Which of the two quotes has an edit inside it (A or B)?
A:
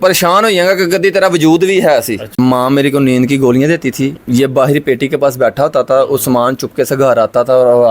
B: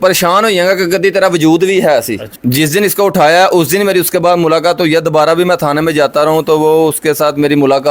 A